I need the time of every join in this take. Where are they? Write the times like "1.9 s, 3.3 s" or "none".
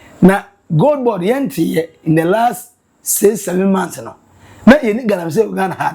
none